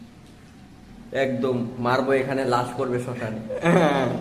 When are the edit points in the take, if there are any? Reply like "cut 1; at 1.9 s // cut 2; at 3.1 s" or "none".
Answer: none